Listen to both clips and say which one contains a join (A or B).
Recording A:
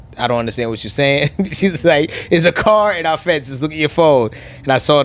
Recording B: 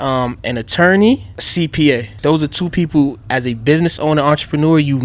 B